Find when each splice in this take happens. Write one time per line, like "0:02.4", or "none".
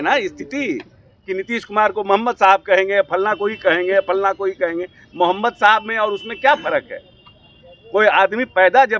none